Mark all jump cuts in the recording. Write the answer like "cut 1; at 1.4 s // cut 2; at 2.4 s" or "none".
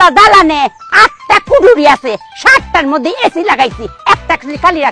none